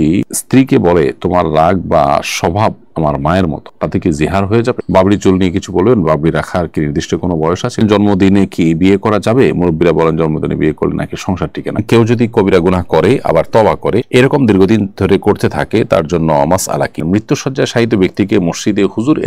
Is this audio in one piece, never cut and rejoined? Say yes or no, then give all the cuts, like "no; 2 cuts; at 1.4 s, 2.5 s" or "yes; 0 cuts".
no; 4 cuts; at 4.8 s, 7.8 s, 11.8 s, 17.0 s